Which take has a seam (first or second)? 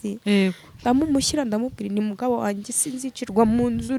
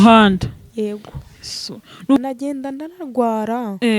second